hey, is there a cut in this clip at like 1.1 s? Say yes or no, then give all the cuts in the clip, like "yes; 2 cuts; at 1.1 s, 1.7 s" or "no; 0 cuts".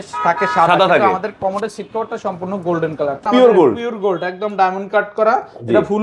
no; 1 cut; at 3.2 s